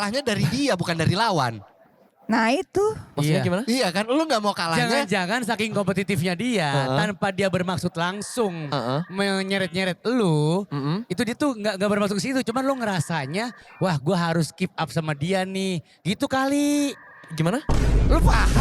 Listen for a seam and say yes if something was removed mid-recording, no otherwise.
no